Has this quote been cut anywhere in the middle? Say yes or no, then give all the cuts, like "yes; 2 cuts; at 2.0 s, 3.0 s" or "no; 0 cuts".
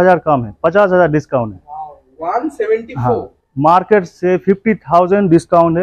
no; 0 cuts